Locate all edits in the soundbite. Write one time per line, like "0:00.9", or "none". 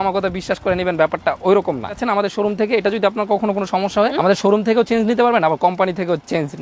0:02.0
0:04.2